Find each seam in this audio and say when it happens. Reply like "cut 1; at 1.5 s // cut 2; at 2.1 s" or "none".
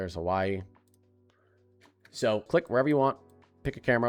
cut 1; at 2.5 s